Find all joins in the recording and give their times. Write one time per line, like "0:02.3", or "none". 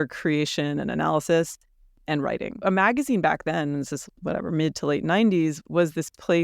0:02.6